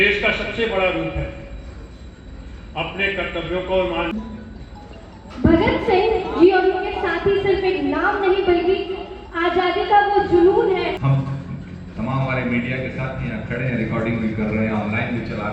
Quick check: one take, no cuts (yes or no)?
no